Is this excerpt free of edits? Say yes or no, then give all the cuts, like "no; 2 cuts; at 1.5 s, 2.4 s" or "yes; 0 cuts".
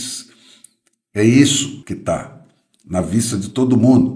no; 1 cut; at 1.8 s